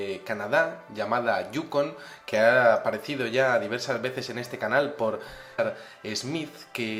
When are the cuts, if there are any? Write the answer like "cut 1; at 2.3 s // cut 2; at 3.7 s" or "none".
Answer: none